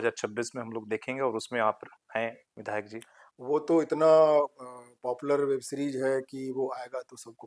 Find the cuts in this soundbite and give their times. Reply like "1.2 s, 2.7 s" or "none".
none